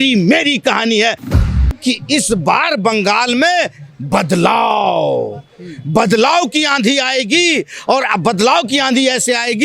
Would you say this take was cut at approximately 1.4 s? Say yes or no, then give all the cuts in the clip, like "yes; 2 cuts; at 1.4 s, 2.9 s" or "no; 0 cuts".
yes; 1 cut; at 1.4 s